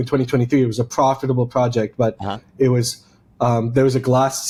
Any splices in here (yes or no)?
no